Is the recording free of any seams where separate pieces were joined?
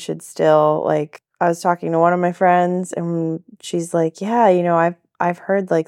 no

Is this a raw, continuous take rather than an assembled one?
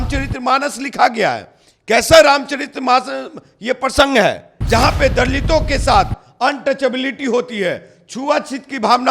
no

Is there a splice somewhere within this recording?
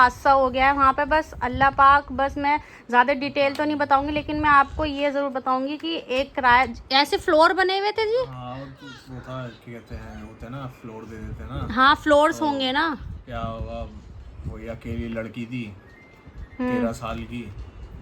no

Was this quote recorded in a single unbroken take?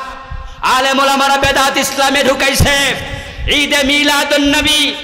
yes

